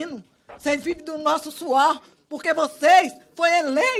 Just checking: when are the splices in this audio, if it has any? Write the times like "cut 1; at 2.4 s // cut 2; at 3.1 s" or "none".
none